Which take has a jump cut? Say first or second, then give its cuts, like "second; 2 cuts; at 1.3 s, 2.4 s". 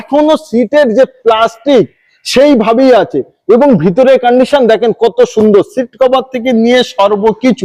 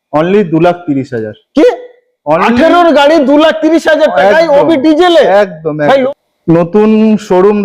second; 1 cut; at 6.0 s